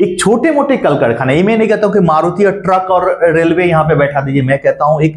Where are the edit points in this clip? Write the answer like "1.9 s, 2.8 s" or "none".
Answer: none